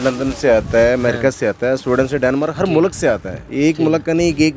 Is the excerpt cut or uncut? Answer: uncut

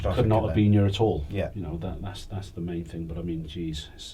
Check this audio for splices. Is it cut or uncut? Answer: uncut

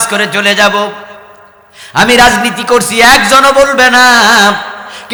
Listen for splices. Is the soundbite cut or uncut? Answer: uncut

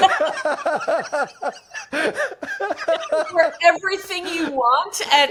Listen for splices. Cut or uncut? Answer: uncut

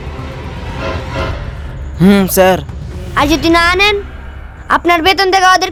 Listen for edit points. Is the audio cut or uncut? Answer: uncut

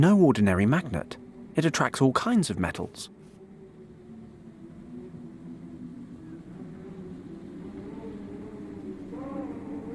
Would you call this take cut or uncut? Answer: uncut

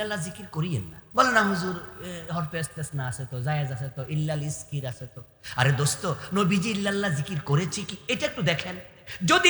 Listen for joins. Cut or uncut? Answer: cut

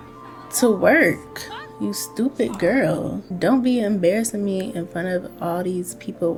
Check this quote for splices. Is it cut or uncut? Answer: uncut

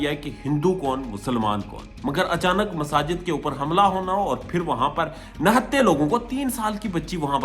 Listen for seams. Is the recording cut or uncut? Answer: cut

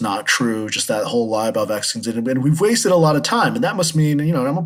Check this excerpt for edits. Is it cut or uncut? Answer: uncut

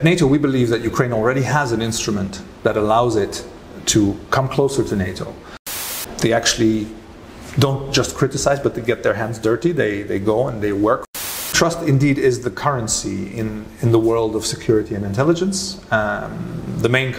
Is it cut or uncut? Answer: cut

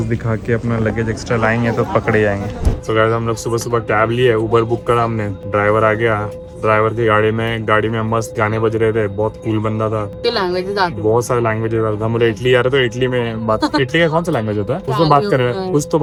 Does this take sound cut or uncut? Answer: uncut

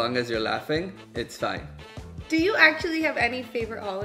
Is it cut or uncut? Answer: cut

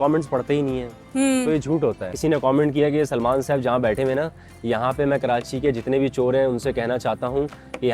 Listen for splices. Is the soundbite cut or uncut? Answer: cut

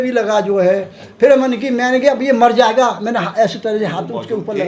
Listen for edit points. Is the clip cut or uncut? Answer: uncut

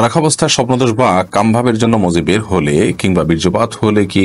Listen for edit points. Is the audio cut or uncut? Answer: uncut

